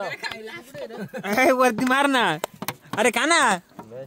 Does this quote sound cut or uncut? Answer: uncut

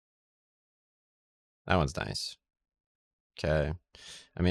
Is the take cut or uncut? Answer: uncut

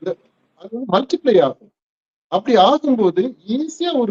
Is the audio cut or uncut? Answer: uncut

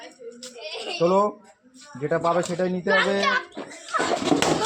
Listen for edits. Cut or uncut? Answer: uncut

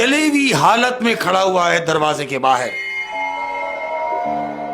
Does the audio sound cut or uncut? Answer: uncut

